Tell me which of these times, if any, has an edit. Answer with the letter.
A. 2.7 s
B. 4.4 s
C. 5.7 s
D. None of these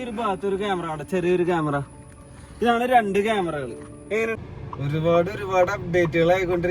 B